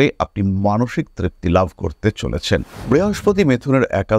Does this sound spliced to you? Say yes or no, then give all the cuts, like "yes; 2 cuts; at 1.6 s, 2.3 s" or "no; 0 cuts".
yes; 1 cut; at 2.7 s